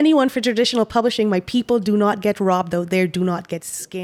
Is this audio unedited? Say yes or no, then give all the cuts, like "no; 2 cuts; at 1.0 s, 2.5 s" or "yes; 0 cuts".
yes; 0 cuts